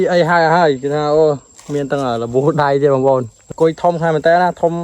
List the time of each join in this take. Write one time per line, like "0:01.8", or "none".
0:03.4